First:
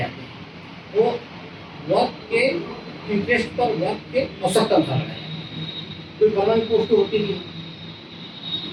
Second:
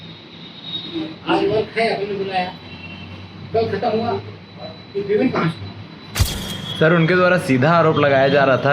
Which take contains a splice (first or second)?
second